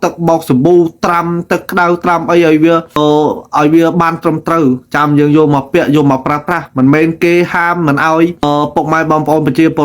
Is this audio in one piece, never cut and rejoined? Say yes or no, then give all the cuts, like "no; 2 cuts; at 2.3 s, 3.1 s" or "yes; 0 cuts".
no; 2 cuts; at 2.9 s, 8.4 s